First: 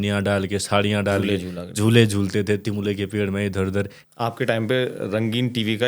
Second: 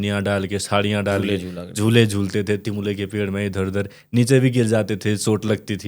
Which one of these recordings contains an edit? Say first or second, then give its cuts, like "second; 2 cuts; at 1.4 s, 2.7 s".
first; 1 cut; at 4.0 s